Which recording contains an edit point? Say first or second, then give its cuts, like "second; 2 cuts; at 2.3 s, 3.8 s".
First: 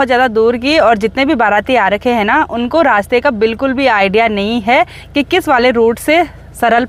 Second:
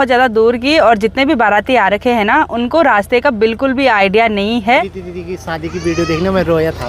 second; 1 cut; at 5.0 s